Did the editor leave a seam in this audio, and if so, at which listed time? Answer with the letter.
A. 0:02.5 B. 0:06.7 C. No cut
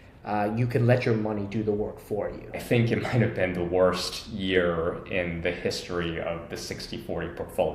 A